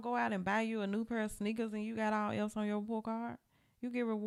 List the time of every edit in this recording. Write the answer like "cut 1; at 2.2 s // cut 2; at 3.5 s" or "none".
none